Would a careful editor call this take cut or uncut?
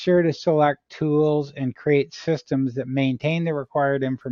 uncut